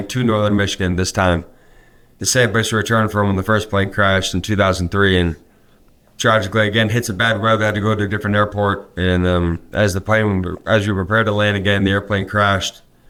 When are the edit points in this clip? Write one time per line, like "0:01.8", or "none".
none